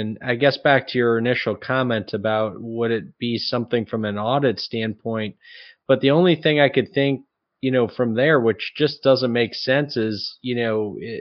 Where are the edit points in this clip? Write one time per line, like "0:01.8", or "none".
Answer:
none